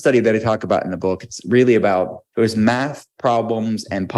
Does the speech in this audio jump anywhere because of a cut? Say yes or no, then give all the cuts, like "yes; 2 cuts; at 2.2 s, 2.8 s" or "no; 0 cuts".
yes; 1 cut; at 2.2 s